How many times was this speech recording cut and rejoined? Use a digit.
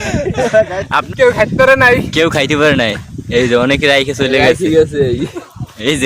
1